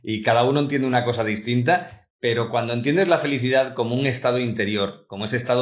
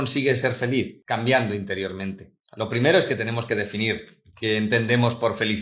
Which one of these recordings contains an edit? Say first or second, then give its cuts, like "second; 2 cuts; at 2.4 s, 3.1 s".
second; 1 cut; at 1.0 s